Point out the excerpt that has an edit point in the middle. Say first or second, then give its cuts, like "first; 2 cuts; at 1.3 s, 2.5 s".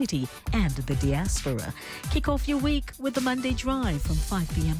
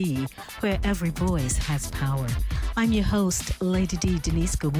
second; 1 cut; at 3.3 s